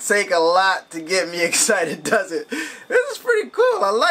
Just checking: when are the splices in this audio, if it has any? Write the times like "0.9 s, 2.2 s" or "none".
none